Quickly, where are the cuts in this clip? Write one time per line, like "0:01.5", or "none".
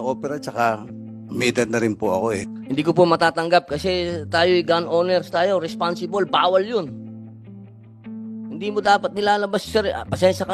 0:02.4
0:07.4
0:08.6